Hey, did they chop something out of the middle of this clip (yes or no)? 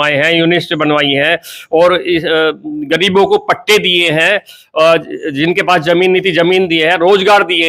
no